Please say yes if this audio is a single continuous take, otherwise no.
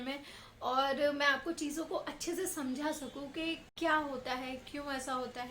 yes